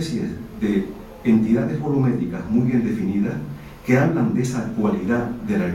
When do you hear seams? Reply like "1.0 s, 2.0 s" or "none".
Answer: none